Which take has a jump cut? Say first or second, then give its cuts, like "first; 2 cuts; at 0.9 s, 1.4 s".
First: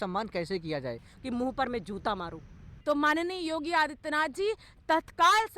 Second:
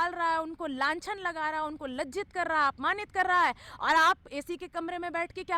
first; 2 cuts; at 1.1 s, 2.7 s